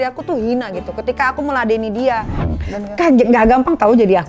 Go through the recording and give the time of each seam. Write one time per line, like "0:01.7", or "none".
0:02.3

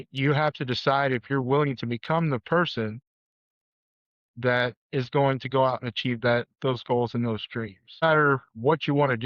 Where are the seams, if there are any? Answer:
0:08.0

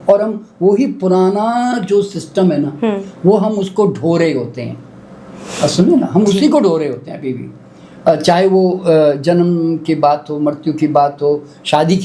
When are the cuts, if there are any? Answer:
none

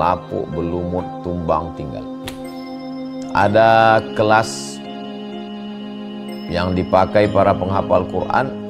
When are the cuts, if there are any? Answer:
none

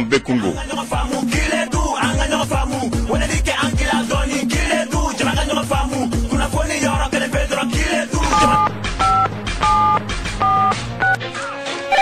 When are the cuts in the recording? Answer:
0:08.3

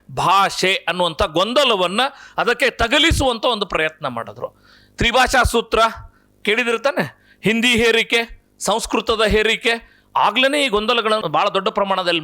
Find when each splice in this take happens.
0:11.2

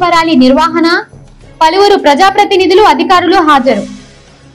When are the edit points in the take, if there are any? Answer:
none

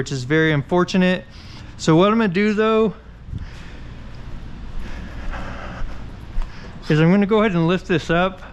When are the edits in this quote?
none

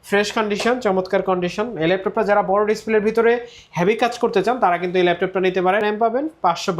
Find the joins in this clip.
0:05.8

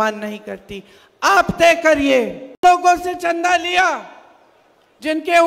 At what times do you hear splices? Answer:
0:02.6

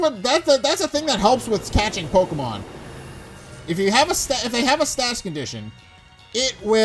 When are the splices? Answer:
none

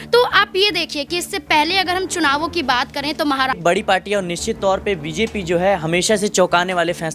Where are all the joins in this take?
0:03.6

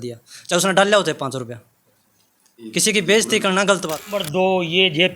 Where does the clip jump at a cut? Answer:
0:04.2

